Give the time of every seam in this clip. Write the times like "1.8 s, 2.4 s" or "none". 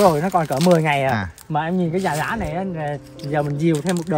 none